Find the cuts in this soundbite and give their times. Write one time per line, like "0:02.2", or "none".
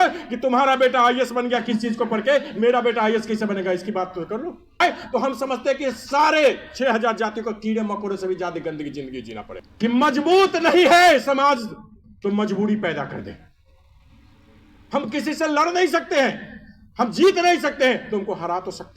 0:04.8
0:09.6

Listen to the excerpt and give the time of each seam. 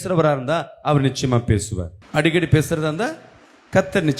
none

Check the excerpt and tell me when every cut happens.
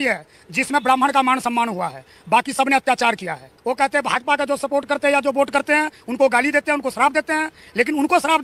0:03.5

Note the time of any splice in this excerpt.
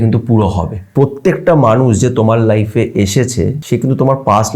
0:00.9
0:03.6

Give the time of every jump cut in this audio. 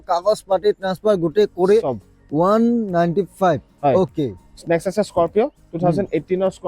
none

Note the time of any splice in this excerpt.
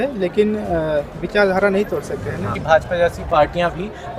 0:02.6

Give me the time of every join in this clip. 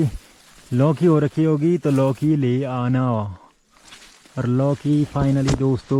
none

